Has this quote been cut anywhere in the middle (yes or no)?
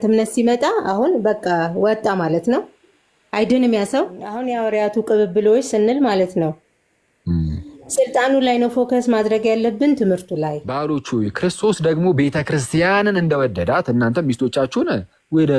yes